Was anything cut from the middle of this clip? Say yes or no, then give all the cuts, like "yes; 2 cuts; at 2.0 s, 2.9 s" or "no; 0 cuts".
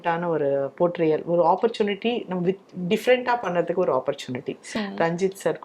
yes; 1 cut; at 4.7 s